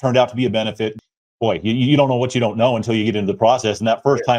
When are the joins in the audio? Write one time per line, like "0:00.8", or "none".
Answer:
0:00.9